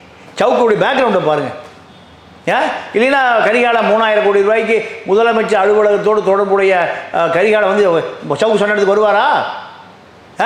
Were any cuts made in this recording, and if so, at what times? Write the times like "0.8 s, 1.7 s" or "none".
none